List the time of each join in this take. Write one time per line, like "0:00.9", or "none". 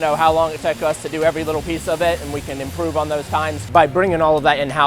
0:03.6